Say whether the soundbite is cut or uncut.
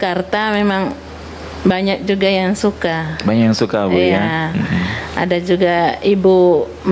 uncut